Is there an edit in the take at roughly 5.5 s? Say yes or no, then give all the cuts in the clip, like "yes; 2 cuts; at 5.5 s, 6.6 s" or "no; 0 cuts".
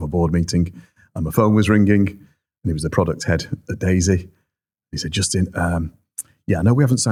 no; 0 cuts